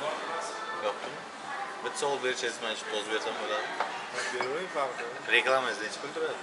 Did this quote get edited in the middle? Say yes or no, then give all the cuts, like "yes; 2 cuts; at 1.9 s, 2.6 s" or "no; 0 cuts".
no; 0 cuts